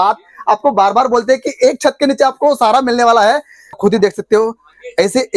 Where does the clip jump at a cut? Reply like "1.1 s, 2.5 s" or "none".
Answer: 3.8 s